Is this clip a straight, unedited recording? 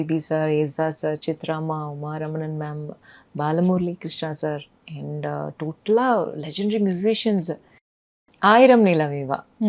no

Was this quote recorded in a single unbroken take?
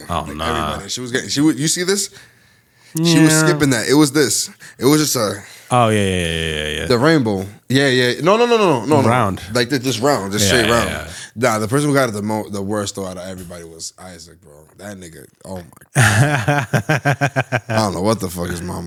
yes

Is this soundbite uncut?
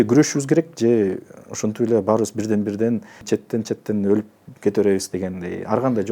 no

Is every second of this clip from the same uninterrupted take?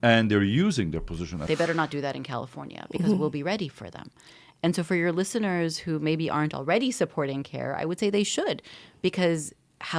no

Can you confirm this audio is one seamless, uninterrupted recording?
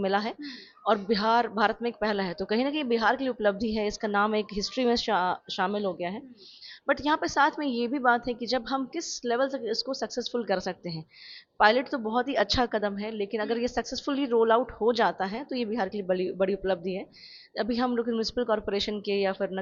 yes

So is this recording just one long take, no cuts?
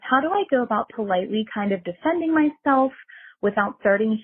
yes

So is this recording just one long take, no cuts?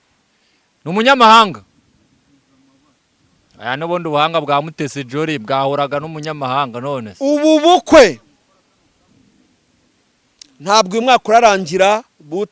yes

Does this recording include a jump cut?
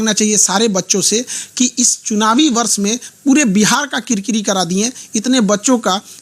no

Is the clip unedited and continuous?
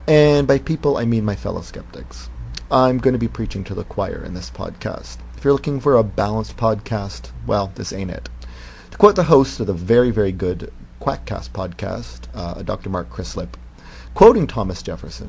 no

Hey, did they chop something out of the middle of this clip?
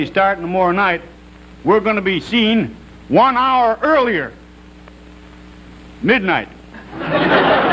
yes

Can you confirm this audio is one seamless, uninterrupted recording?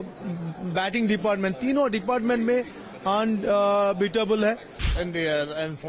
no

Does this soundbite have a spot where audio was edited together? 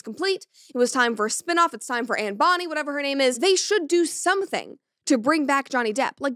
no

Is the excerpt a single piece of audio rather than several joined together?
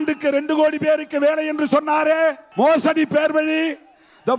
no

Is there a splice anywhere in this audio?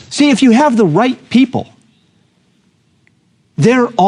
no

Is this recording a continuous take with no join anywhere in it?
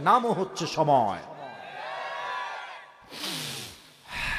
yes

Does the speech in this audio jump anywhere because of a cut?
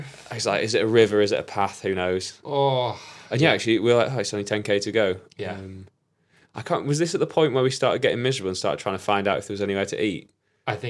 no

